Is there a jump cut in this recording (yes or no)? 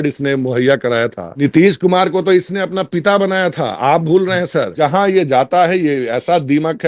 yes